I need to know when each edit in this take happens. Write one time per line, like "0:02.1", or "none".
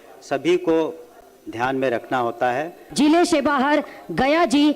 0:02.8